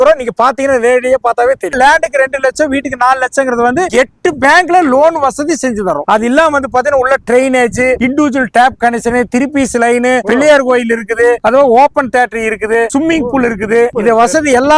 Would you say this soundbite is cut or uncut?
uncut